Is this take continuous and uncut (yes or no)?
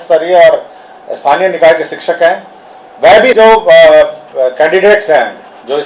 no